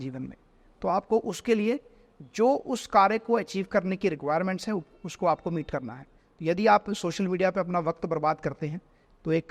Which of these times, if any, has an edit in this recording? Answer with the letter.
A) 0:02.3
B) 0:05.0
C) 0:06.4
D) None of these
D